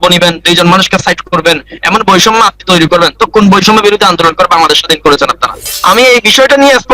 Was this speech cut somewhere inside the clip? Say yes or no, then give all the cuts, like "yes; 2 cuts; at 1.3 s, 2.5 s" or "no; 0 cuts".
yes; 1 cut; at 5.7 s